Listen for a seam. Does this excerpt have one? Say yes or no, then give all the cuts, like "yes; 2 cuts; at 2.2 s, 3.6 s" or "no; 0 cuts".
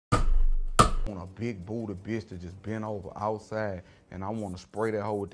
yes; 1 cut; at 1.1 s